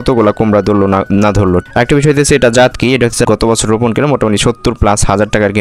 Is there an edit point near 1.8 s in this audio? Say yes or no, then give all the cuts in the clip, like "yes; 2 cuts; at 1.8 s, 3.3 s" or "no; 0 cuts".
no; 1 cut; at 3.3 s